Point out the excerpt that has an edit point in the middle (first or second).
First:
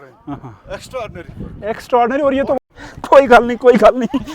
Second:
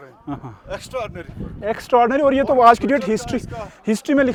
first